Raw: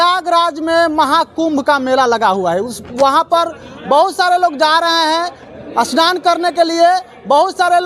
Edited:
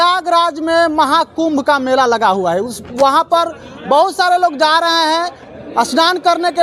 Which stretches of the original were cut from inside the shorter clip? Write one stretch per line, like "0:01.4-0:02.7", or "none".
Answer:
none